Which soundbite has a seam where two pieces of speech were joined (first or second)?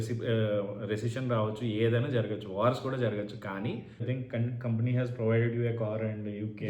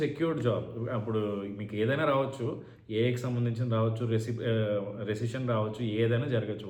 first